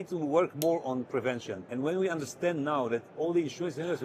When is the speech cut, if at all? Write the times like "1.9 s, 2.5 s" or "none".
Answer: 1.6 s